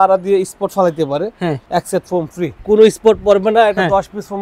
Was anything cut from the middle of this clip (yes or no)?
yes